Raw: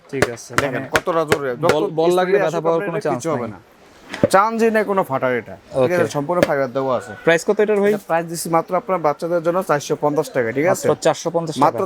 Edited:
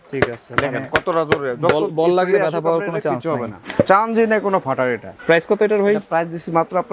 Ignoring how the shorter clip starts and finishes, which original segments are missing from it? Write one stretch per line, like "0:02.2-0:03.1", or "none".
0:03.6-0:04.0
0:05.6-0:07.1